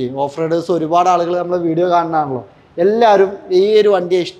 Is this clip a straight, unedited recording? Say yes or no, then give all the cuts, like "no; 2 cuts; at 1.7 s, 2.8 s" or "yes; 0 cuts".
yes; 0 cuts